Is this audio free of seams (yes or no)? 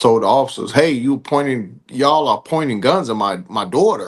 yes